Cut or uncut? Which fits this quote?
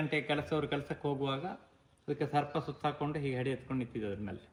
uncut